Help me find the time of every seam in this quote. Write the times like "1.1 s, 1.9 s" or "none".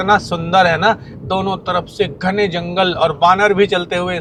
none